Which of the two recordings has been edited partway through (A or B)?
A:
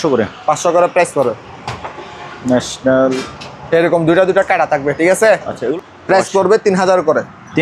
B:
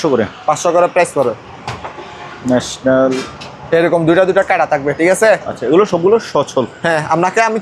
A